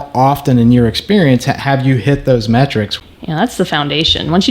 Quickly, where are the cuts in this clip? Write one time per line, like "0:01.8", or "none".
0:02.9